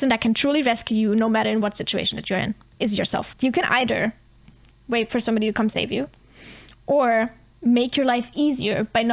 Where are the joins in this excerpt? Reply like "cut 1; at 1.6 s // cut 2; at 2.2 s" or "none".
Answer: cut 1; at 3.3 s // cut 2; at 7.4 s